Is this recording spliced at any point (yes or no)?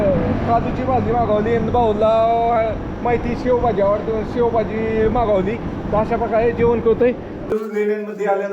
yes